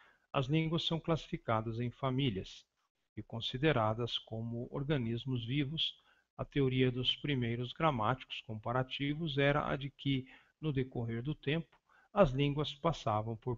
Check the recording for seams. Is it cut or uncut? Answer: uncut